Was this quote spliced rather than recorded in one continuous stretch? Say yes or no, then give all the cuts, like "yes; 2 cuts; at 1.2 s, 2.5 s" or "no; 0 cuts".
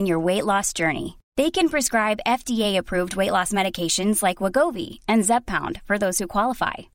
no; 0 cuts